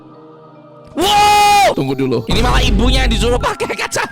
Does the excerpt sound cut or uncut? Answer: cut